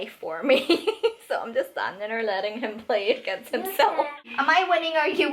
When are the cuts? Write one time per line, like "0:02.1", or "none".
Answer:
0:04.2